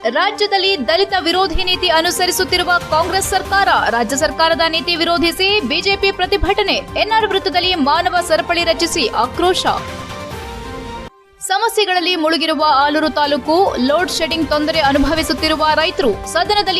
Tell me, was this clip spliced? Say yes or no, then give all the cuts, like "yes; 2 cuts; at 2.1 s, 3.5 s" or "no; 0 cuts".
no; 0 cuts